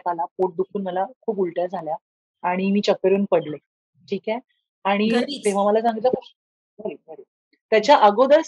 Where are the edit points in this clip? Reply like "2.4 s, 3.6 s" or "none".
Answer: none